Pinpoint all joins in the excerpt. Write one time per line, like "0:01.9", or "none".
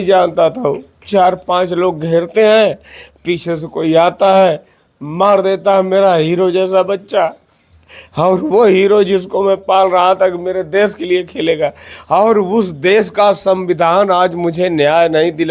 none